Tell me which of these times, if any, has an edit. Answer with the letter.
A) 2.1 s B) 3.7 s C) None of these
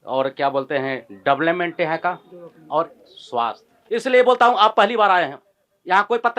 B